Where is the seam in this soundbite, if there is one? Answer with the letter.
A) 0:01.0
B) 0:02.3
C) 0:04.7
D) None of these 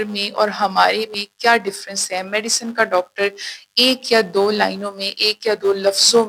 D